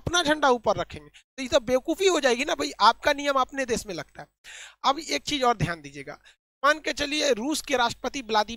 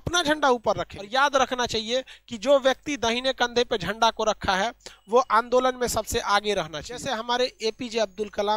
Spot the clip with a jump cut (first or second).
second